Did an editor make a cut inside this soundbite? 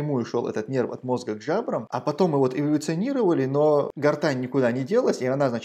yes; 2 cuts; at 1.9 s, 3.9 s

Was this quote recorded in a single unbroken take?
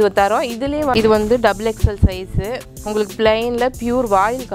no; 1 cut; at 0.9 s

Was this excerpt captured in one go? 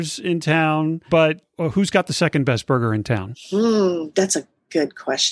no; 1 cut; at 1.3 s

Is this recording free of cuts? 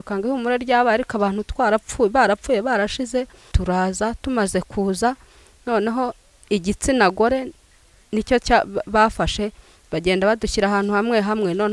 no; 1 cut; at 3.5 s

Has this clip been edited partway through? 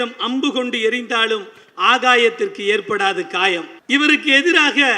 yes; 1 cut; at 3.7 s

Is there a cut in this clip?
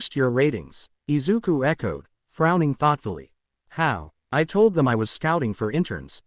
yes; 1 cut; at 4.1 s

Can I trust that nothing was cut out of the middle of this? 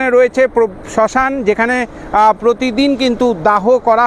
yes; 0 cuts

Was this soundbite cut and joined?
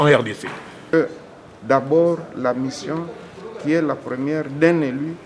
yes; 1 cut; at 0.9 s

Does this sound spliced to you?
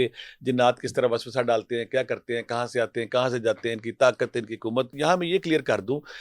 yes; 1 cut; at 4.9 s

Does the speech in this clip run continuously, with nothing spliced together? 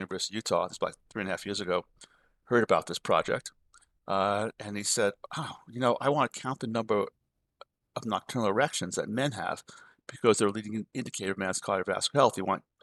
yes; 0 cuts

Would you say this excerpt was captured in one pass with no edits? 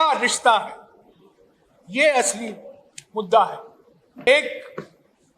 no; 1 cut; at 4.3 s

